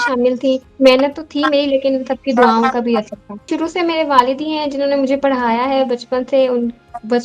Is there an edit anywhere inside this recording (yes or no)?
yes